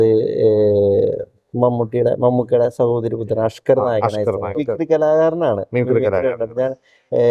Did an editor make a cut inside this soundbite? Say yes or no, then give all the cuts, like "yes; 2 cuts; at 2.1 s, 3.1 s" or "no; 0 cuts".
yes; 1 cut; at 4.6 s